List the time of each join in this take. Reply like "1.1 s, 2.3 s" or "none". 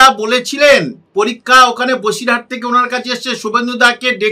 1.0 s